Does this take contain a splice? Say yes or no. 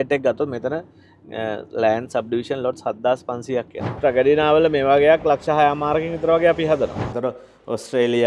yes